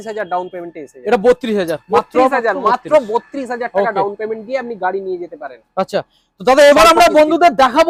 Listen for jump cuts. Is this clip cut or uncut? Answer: uncut